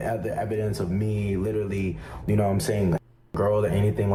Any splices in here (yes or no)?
no